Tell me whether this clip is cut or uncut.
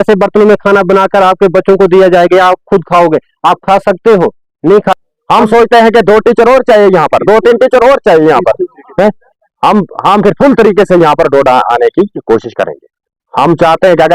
cut